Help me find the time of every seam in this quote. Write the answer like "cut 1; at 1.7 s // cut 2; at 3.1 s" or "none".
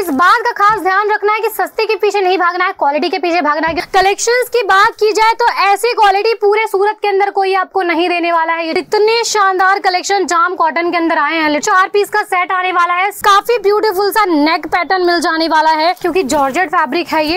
cut 1; at 3.8 s // cut 2; at 8.8 s // cut 3; at 11.6 s // cut 4; at 13.2 s // cut 5; at 16.0 s